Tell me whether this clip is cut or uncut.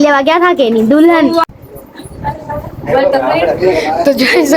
cut